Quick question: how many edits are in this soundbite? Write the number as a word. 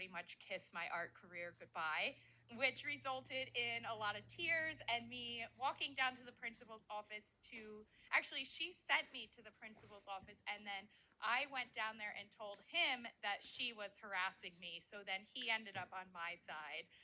zero